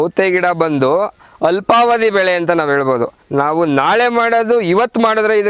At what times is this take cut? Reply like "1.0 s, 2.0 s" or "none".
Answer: none